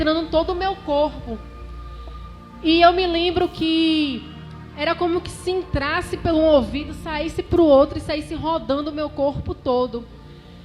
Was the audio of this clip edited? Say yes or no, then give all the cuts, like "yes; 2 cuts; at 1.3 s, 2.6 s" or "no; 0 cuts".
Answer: no; 0 cuts